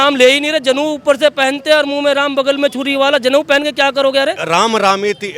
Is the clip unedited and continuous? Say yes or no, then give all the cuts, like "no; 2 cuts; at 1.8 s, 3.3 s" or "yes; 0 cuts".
no; 1 cut; at 4.4 s